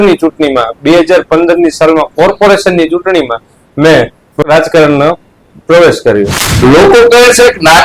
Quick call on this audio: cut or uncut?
cut